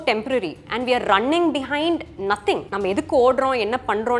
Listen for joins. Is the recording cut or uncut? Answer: cut